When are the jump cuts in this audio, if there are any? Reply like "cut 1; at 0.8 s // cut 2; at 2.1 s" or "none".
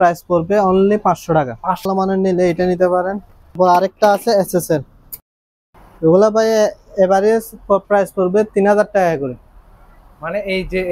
cut 1; at 1.9 s // cut 2; at 3.5 s // cut 3; at 5.1 s